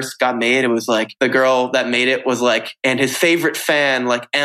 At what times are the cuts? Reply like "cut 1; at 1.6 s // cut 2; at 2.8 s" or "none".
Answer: cut 1; at 1.1 s // cut 2; at 2.7 s